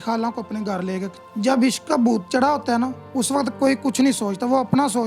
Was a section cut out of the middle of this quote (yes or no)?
yes